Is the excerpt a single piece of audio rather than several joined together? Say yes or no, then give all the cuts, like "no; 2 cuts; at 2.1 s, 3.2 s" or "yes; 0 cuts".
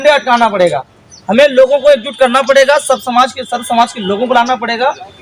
yes; 0 cuts